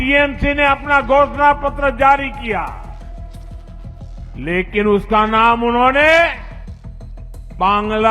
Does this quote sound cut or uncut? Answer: uncut